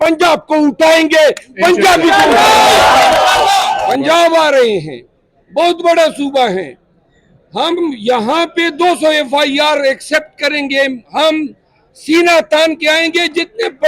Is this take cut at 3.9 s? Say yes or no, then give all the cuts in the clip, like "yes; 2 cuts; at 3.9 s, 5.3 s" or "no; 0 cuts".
yes; 1 cut; at 3.9 s